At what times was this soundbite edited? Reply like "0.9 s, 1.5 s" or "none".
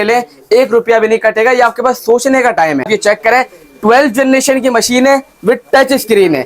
2.9 s